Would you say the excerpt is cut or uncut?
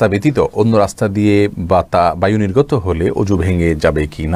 uncut